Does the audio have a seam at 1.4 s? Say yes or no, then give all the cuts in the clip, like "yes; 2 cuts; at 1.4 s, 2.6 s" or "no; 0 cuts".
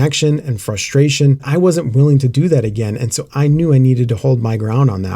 yes; 1 cut; at 1.4 s